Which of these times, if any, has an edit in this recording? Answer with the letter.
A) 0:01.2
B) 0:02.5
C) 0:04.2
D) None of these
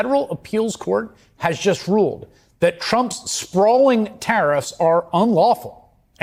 D